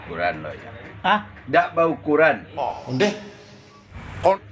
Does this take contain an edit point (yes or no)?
no